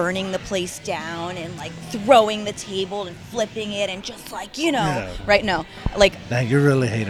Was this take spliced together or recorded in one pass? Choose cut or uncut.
uncut